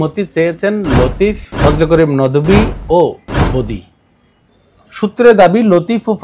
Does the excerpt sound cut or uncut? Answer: cut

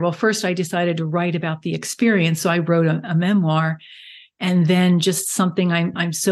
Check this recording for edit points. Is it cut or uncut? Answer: uncut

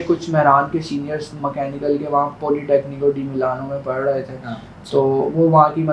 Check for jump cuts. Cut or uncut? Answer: uncut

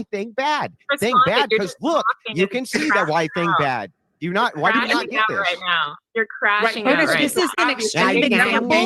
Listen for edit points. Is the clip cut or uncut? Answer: cut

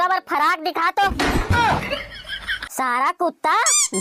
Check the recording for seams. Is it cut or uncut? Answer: uncut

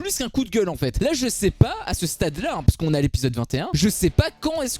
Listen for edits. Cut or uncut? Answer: cut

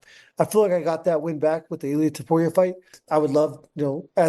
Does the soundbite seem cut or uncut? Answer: cut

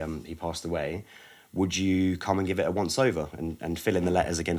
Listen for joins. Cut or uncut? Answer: uncut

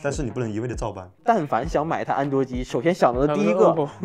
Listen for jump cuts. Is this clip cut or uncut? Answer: cut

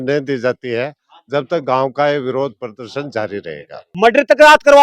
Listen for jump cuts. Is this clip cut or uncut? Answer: cut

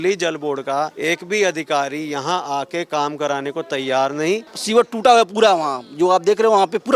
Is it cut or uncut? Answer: cut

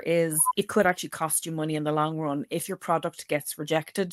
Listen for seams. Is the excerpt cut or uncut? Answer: uncut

